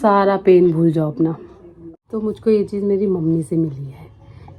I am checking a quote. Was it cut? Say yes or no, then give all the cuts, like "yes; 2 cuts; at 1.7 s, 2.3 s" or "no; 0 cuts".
yes; 1 cut; at 1.9 s